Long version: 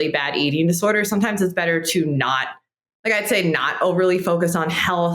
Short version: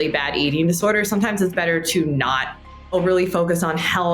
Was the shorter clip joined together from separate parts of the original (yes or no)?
yes